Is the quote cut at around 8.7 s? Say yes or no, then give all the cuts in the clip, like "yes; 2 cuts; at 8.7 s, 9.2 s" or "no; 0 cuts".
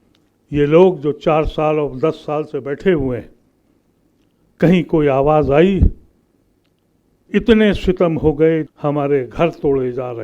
yes; 1 cut; at 8.7 s